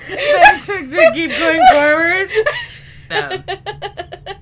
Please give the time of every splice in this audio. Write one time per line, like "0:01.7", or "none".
0:03.1